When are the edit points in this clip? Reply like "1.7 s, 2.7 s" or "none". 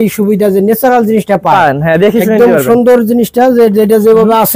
none